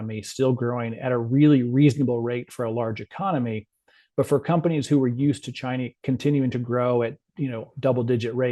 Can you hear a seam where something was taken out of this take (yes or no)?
no